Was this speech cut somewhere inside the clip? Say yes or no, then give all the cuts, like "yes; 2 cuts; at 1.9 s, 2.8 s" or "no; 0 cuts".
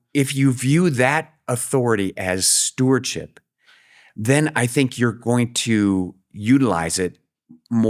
no; 0 cuts